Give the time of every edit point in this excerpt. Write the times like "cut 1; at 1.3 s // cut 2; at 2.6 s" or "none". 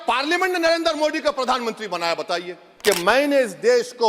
cut 1; at 2.6 s

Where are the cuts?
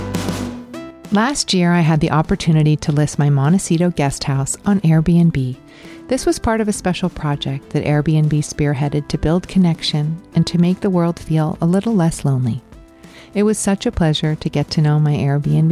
cut 1; at 1.0 s

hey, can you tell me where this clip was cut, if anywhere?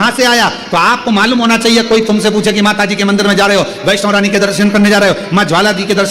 none

